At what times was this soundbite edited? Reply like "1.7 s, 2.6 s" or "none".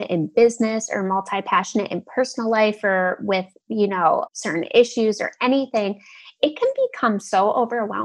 4.3 s